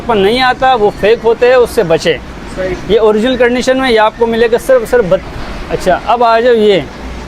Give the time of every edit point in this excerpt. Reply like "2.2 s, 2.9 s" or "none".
5.3 s

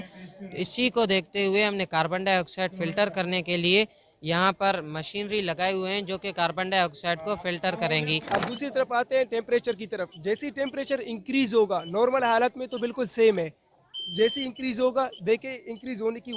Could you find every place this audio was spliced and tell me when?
8.1 s

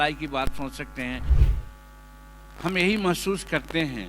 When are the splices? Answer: 1.3 s

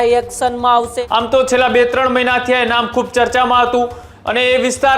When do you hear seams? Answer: 0.9 s, 4.1 s

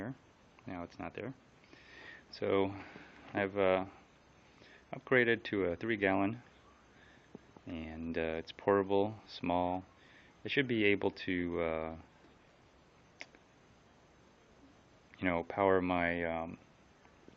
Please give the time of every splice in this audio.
14.4 s

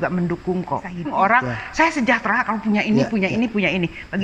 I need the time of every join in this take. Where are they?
1.1 s

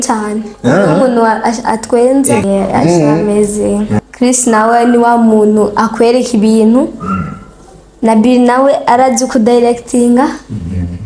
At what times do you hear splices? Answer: 2.5 s, 3.9 s

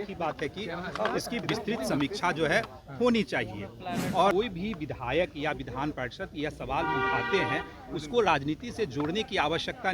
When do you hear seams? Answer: 4.3 s

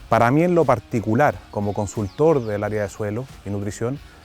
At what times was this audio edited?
1.5 s

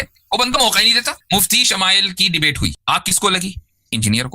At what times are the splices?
1.1 s, 2.8 s

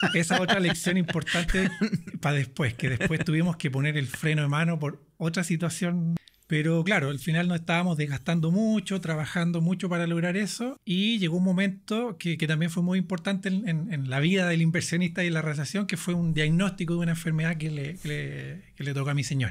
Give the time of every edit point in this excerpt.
6.2 s, 10.8 s

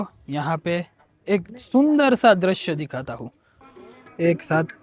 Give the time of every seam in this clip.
3.6 s

